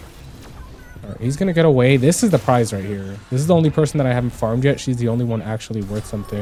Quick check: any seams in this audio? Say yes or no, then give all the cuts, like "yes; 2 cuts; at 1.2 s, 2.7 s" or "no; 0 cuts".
no; 0 cuts